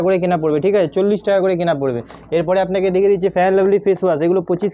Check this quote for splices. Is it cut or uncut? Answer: uncut